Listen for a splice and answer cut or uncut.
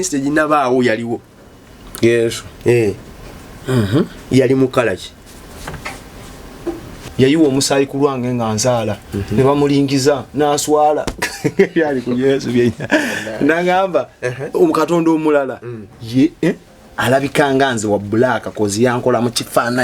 cut